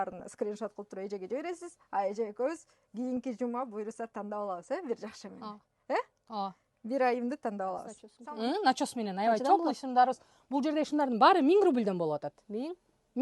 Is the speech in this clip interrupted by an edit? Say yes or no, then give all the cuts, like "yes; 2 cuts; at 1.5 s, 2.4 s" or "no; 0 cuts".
yes; 1 cut; at 7.9 s